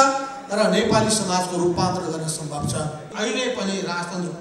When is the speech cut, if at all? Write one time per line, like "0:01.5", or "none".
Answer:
0:03.1